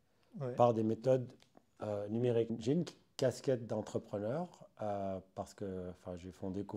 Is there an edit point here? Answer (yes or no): yes